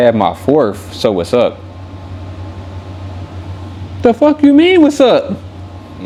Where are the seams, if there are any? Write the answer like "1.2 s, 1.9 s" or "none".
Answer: none

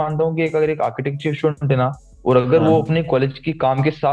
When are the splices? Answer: none

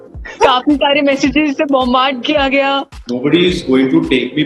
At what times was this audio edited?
2.9 s

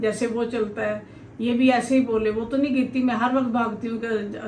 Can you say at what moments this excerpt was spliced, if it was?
none

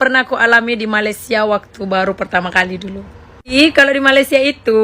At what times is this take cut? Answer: 3.5 s

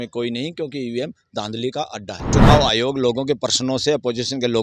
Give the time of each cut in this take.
2.3 s

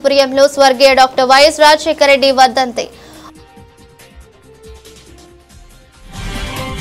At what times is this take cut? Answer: 2.9 s

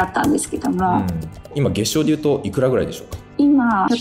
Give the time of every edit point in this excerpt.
1.5 s

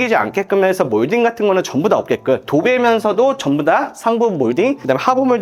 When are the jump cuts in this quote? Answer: none

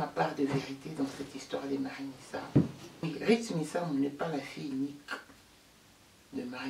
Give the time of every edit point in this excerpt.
3.0 s

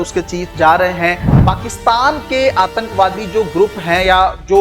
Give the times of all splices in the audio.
1.3 s

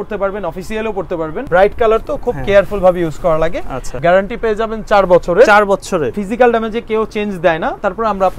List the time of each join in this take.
1.4 s, 4.0 s, 6.2 s

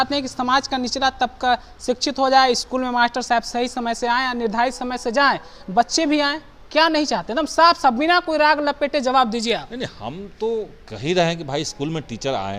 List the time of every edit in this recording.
none

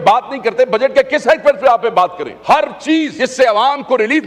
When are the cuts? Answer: 2.3 s, 3.1 s

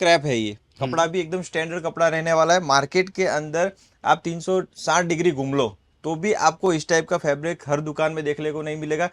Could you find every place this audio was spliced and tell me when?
none

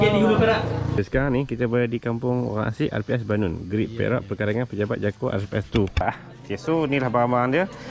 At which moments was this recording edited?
1.0 s, 6.0 s

